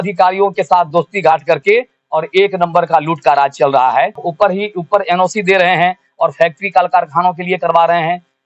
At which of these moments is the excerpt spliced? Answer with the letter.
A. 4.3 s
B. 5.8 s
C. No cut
A